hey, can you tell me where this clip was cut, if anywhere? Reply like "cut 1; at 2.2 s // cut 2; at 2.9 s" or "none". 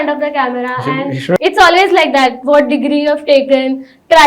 cut 1; at 1.4 s